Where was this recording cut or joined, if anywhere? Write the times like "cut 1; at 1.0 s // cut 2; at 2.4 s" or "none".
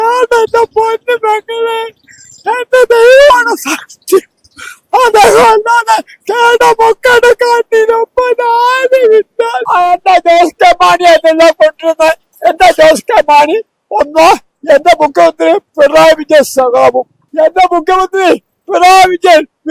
cut 1; at 9.6 s // cut 2; at 17.2 s